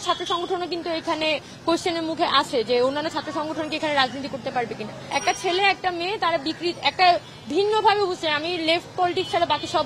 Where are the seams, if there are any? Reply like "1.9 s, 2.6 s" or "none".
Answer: 4.9 s